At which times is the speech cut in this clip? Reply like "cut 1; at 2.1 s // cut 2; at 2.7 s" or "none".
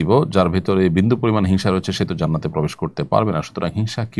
none